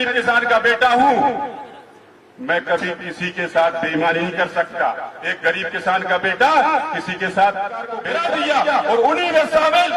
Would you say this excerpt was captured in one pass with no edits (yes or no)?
no